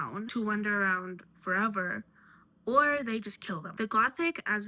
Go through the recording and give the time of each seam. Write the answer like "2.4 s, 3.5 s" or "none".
3.7 s

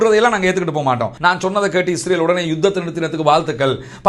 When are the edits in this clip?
1.1 s

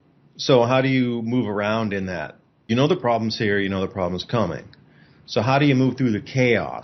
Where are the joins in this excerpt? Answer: 2.7 s

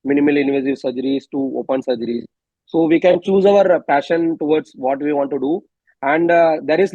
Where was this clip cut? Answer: none

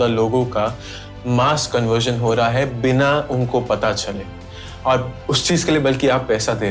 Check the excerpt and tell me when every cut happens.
none

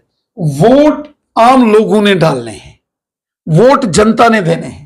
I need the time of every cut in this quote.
none

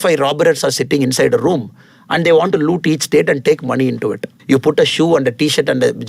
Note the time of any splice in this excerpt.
4.3 s

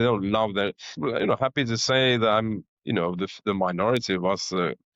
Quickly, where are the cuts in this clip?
1.0 s

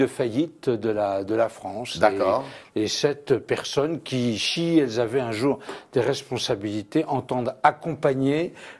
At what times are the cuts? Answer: 5.1 s

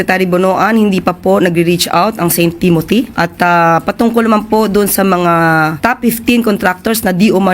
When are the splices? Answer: 3.1 s, 5.8 s

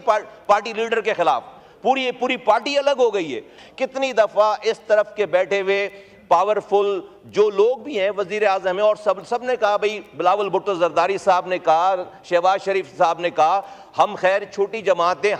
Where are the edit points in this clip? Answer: 3.5 s

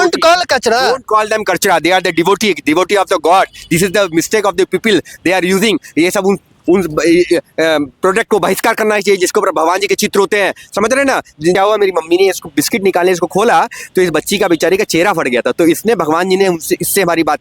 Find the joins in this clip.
11.6 s

